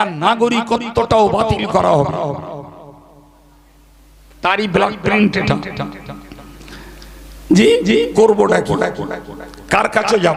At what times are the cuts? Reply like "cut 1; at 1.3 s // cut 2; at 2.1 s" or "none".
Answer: none